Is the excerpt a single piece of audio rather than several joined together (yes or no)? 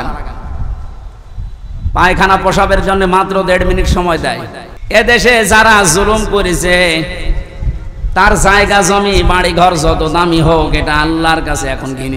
no